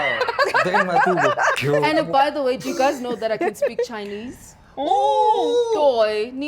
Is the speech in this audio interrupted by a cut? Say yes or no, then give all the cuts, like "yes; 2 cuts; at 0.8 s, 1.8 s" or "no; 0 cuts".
yes; 1 cut; at 1.5 s